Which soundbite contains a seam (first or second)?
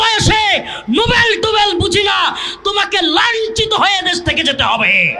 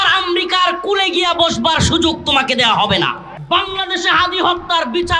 second